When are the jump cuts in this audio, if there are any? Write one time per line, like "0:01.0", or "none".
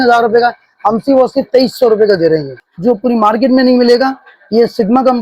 0:02.5